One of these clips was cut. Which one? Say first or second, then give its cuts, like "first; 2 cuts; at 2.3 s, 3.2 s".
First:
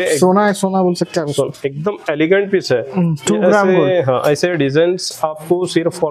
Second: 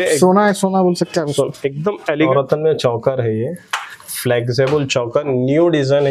second; 1 cut; at 2.3 s